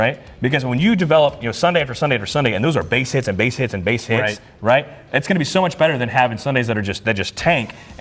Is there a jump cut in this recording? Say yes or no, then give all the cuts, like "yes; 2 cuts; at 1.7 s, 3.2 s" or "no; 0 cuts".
no; 0 cuts